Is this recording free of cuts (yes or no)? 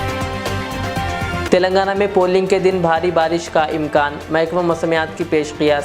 no